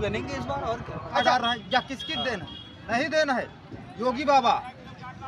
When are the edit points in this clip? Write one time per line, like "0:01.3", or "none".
0:01.1